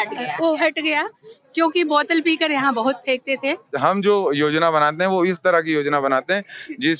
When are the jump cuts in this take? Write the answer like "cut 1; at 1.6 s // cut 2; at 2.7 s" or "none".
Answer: cut 1; at 3.7 s